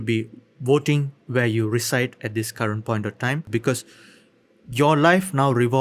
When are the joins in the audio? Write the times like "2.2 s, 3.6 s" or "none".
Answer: 3.5 s